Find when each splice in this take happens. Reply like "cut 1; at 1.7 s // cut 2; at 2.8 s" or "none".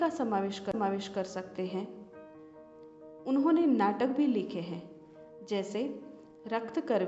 cut 1; at 5.7 s